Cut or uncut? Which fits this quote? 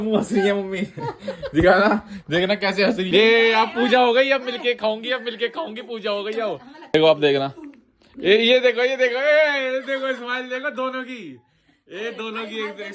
cut